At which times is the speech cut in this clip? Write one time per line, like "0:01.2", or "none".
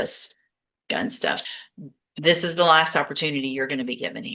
0:01.4